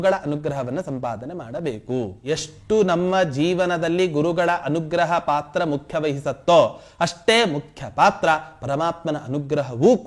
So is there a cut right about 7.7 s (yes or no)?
no